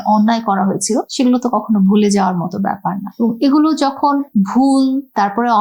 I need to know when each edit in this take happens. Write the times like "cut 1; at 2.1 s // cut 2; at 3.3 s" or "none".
none